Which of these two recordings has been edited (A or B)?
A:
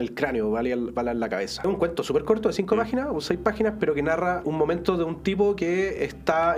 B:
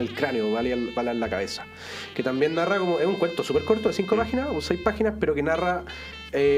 A